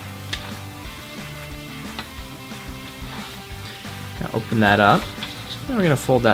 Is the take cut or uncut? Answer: cut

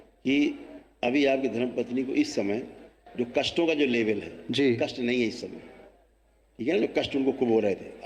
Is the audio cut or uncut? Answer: uncut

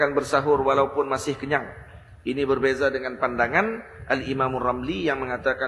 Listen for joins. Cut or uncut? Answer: uncut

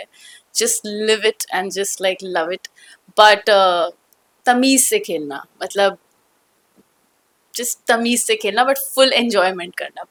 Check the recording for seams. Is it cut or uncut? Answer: uncut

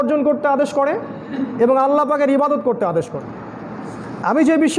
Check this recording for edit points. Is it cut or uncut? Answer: cut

